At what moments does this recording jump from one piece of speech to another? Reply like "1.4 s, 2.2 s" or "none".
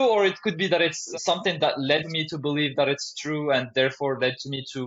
1.1 s, 2.1 s